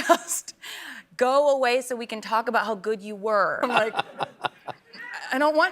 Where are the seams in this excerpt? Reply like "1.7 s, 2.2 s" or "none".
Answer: 3.6 s